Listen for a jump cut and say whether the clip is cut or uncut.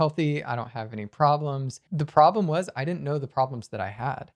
cut